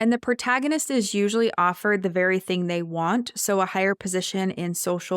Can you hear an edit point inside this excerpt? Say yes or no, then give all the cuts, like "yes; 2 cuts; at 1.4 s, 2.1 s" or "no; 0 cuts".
no; 0 cuts